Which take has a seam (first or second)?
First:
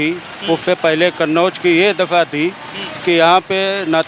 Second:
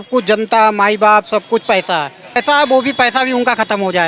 second